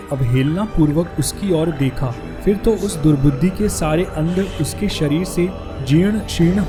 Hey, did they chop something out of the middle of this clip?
no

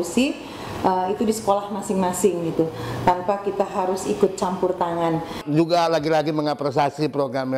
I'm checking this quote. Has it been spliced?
yes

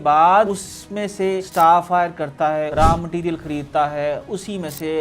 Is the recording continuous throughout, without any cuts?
no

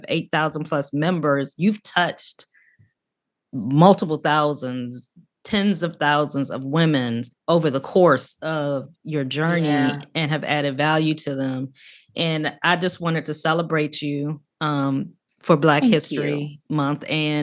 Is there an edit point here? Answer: no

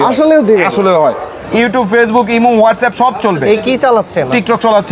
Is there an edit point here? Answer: yes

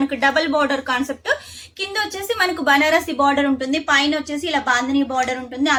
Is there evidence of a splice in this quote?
no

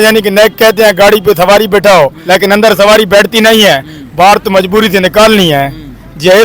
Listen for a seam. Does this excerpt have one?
yes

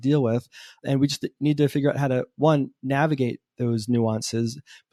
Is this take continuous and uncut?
yes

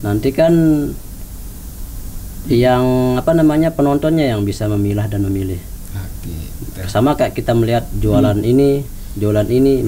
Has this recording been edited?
no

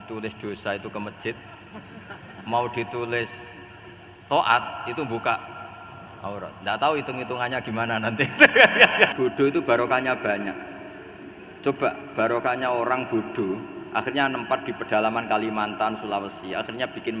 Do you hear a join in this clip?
yes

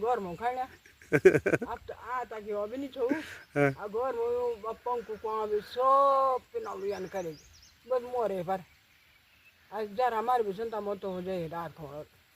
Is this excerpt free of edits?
yes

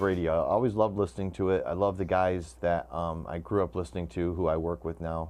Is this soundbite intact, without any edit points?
no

